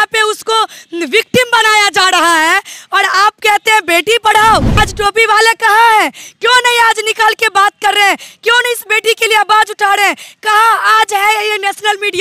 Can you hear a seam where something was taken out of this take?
yes; 1 cut; at 4.8 s

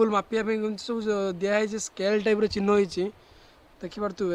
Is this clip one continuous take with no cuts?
yes; 0 cuts

